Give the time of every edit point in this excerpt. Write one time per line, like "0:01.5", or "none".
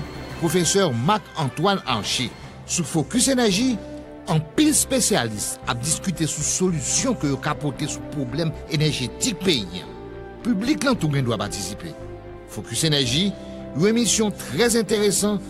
none